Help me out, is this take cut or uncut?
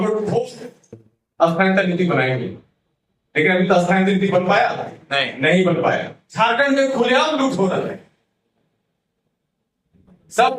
cut